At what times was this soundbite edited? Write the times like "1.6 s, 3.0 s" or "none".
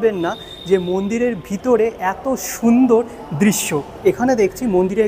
3.9 s

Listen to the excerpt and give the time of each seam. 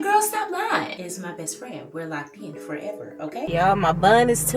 1.1 s, 3.5 s

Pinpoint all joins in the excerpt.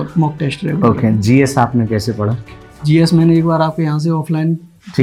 none

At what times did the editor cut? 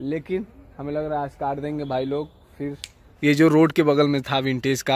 3.1 s

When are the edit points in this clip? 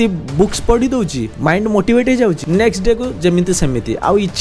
1.2 s, 2.4 s

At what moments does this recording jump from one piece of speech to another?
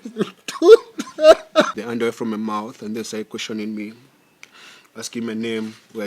1.7 s

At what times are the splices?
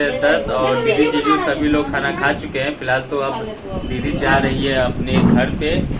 none

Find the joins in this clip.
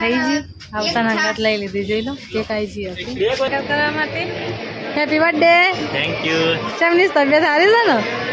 3.5 s

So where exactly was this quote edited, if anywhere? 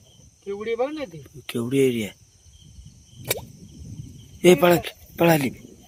none

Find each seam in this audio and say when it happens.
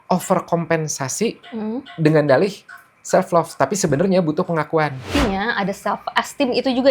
5.1 s

